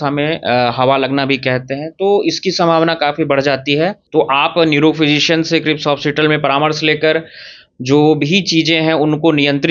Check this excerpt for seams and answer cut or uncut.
cut